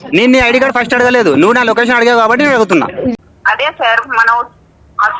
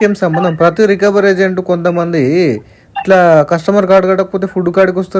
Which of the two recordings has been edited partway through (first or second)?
first